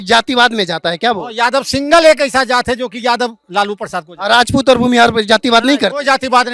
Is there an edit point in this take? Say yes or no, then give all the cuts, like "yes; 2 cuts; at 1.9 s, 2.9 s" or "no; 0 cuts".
no; 0 cuts